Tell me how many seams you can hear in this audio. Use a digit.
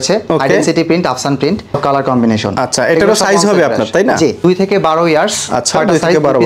2